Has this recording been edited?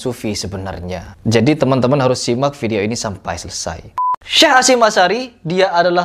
yes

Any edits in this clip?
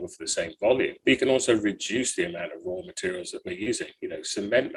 no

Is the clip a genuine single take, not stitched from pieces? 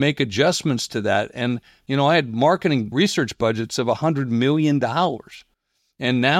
no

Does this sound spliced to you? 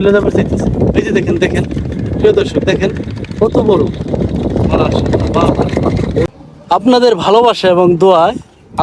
yes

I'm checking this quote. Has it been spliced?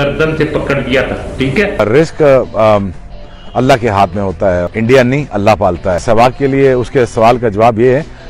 yes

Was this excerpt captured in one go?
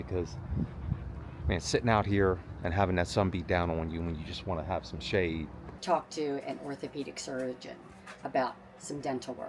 no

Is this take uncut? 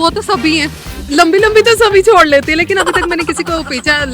yes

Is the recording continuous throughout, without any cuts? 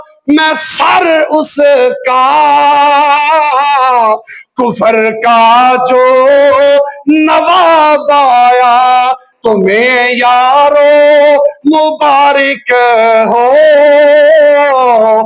yes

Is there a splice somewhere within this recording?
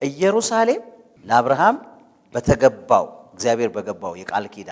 no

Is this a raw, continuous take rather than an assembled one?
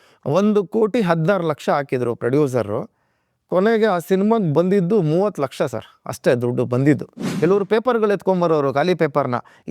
no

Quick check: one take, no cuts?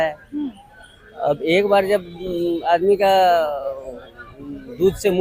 yes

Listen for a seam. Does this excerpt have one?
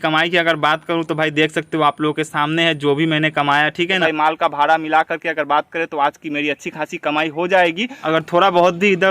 yes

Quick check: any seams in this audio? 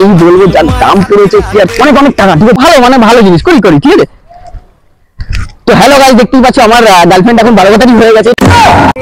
yes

